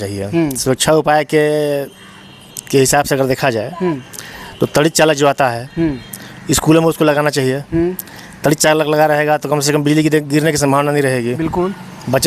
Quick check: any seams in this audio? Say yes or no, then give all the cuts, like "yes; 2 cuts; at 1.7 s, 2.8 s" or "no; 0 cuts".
no; 0 cuts